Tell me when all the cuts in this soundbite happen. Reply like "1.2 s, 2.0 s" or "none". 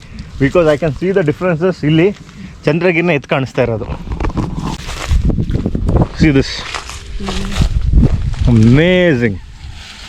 none